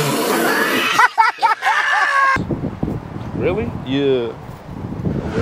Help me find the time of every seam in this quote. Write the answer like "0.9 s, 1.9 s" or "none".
2.4 s